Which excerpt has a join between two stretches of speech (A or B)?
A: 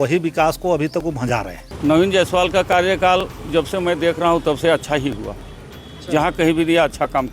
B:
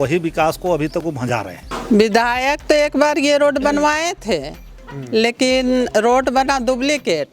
B